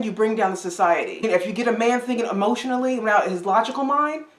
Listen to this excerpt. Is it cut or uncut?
cut